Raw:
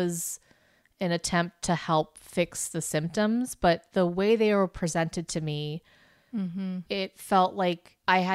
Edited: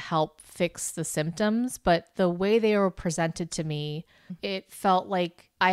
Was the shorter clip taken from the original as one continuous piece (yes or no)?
no